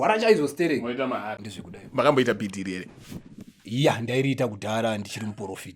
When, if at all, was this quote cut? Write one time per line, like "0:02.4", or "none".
0:01.4